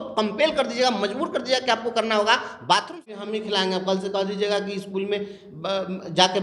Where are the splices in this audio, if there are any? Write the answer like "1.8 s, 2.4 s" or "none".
3.2 s